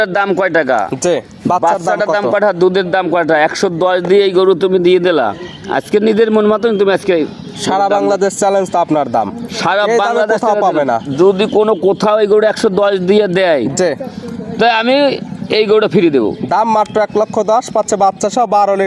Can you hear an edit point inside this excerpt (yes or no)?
no